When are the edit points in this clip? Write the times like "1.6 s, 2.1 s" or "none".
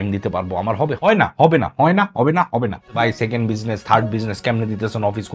1.0 s, 2.9 s